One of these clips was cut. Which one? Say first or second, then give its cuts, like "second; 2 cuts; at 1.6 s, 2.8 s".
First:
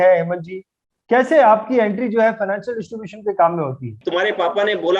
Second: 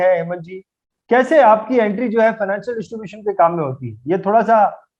first; 1 cut; at 4.0 s